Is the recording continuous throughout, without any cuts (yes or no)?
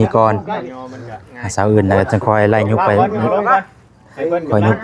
yes